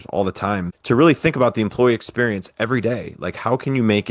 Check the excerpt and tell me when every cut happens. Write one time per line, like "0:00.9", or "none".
none